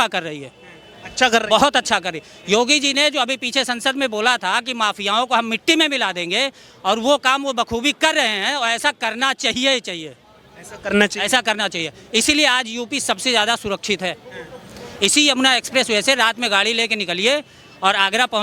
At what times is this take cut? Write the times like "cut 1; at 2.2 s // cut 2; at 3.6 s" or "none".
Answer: none